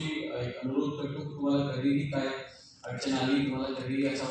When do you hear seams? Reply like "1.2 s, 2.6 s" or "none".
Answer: none